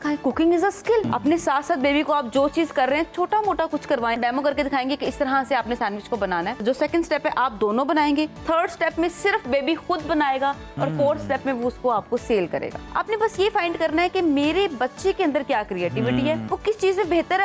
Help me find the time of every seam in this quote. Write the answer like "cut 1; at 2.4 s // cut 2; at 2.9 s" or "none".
cut 1; at 1.1 s // cut 2; at 4.2 s // cut 3; at 6.6 s // cut 4; at 8.4 s // cut 5; at 12.8 s // cut 6; at 16.5 s